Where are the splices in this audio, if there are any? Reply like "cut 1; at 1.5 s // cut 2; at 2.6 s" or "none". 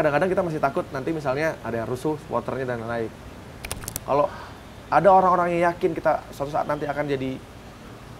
cut 1; at 3.7 s